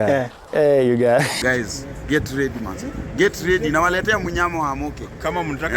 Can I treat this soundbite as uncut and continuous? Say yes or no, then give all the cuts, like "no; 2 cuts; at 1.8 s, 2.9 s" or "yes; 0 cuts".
no; 1 cut; at 1.3 s